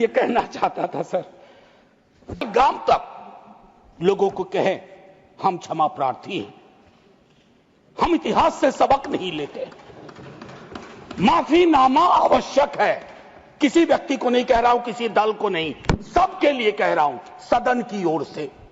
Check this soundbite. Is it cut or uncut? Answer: cut